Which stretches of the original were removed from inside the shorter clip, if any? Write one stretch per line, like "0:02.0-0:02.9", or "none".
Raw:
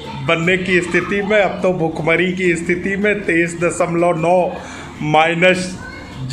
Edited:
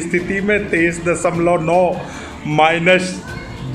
none